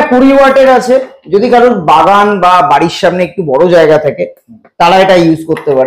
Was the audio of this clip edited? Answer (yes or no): no